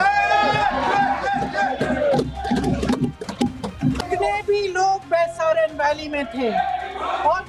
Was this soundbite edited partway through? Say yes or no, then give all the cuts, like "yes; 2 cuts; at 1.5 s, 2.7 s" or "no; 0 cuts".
yes; 1 cut; at 4.0 s